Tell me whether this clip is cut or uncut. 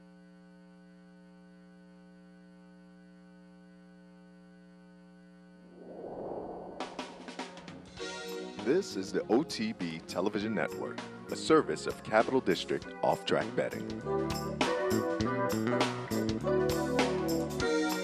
uncut